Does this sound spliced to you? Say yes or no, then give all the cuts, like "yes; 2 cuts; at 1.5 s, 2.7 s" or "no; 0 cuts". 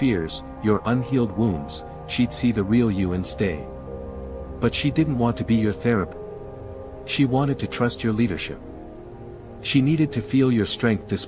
yes; 1 cut; at 6.2 s